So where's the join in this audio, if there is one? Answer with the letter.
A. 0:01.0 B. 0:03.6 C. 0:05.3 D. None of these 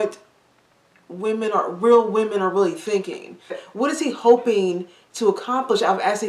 B